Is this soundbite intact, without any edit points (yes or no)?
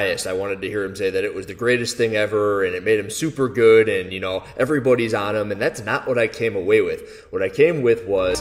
yes